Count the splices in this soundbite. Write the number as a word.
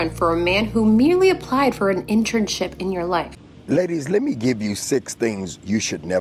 one